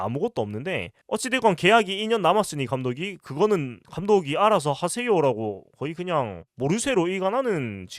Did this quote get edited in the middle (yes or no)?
yes